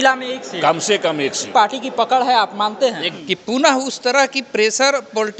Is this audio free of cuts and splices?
no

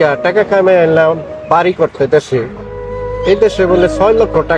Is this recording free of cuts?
yes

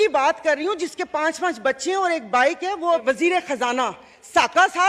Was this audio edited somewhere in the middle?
yes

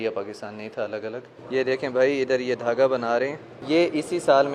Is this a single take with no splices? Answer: no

